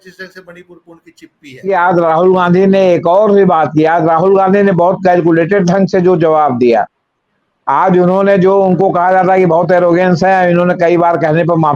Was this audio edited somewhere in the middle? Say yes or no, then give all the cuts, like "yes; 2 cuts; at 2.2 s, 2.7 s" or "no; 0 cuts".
yes; 1 cut; at 1.7 s